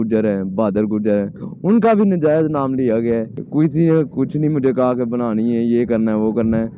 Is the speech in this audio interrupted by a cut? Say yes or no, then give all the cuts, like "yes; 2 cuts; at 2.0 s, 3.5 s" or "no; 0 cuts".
yes; 1 cut; at 3.4 s